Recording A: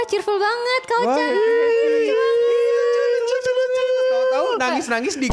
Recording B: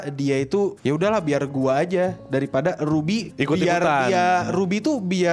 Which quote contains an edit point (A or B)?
B